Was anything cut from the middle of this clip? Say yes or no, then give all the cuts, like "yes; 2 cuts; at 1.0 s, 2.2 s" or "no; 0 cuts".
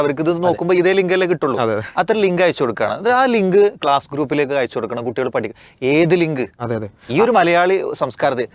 no; 0 cuts